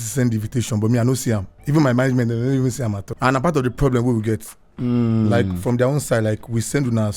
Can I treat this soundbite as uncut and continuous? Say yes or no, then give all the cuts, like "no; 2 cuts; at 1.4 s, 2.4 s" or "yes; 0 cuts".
no; 1 cut; at 3.0 s